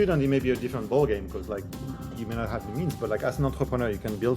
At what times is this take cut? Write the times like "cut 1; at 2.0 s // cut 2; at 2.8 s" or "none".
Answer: none